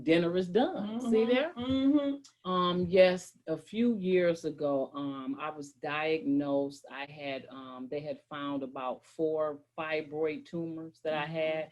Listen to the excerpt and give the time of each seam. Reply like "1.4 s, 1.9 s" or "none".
2.1 s

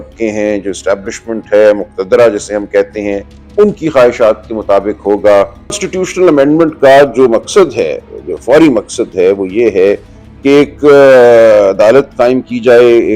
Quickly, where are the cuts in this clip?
5.7 s

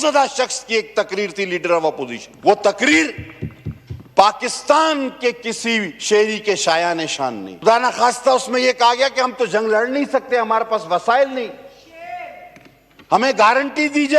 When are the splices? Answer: 2.2 s, 7.5 s

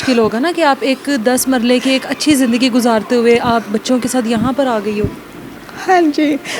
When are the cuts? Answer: none

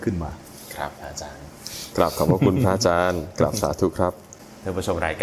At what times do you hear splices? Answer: none

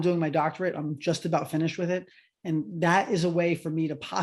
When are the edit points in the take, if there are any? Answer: none

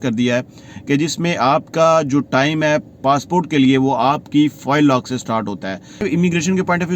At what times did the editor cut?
6.0 s

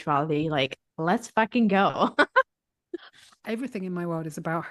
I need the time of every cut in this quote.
3.2 s

